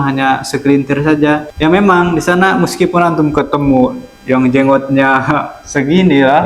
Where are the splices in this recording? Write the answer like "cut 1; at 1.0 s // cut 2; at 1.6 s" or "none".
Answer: cut 1; at 1.5 s